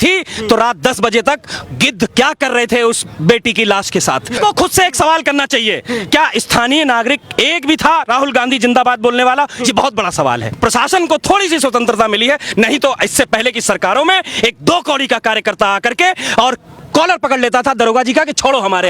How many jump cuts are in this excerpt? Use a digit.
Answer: 2